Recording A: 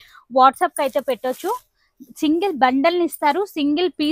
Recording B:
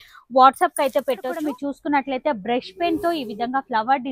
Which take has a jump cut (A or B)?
B